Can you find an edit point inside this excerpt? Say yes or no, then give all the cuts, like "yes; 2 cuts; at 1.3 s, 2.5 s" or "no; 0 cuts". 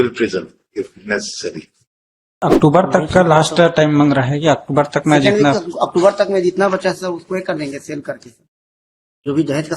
yes; 1 cut; at 2.4 s